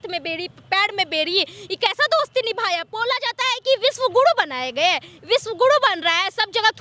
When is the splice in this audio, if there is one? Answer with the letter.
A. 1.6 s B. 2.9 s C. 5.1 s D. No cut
B